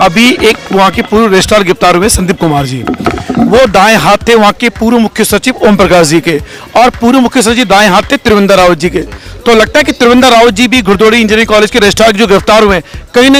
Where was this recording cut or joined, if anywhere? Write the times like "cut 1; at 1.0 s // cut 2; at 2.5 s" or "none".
none